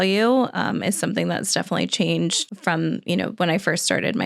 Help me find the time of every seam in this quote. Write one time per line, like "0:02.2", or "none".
0:02.5

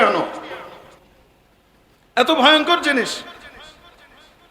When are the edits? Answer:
0:01.0

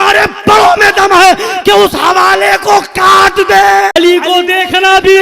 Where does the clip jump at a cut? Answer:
0:03.9

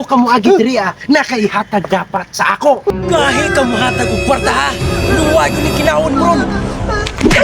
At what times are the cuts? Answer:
0:02.9

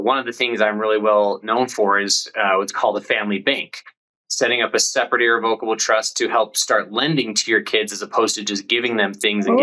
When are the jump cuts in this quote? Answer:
none

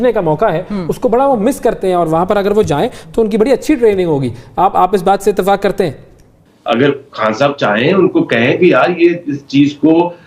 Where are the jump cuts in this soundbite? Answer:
0:06.3

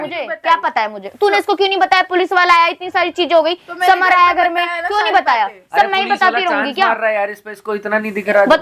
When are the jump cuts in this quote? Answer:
none

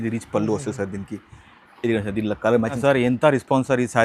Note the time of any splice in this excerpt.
0:02.8

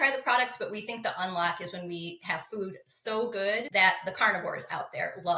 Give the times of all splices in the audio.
0:03.7

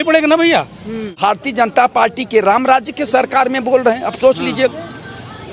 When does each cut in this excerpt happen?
0:01.2

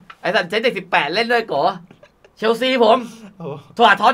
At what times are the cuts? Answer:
none

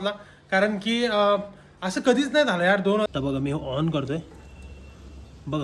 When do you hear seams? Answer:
0:03.1

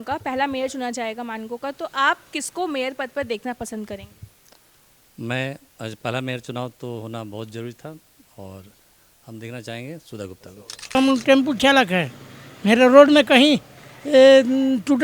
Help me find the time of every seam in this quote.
0:10.8

